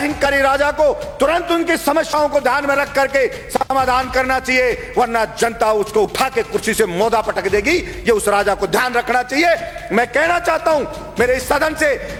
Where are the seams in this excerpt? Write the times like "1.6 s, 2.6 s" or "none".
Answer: none